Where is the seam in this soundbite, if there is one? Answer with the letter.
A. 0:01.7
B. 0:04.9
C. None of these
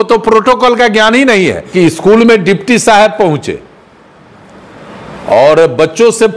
A